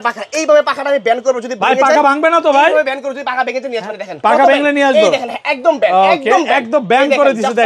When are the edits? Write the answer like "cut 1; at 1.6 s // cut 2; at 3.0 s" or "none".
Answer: none